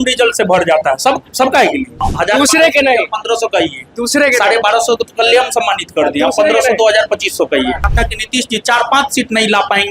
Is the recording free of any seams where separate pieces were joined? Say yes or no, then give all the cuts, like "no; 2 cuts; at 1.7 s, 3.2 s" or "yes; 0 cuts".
no; 2 cuts; at 2.1 s, 7.9 s